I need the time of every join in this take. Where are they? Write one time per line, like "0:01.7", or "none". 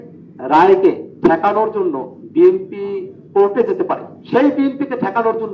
0:01.1
0:02.1
0:03.1
0:04.1